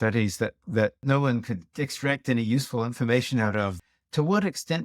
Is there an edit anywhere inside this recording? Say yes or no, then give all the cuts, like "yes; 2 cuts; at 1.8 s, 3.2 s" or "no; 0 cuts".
yes; 2 cuts; at 1.0 s, 3.8 s